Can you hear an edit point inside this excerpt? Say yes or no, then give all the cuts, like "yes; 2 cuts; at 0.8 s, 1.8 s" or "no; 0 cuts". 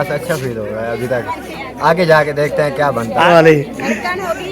yes; 1 cut; at 3.3 s